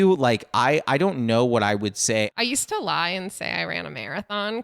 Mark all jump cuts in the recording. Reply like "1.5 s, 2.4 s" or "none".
2.3 s

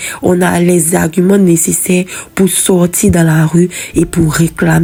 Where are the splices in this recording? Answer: none

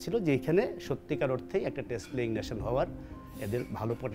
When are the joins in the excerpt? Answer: none

